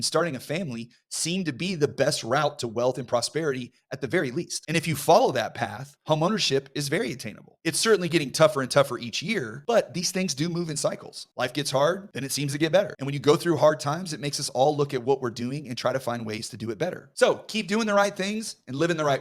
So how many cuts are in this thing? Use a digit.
1